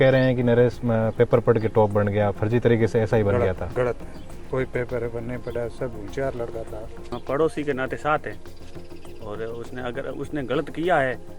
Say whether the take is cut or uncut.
cut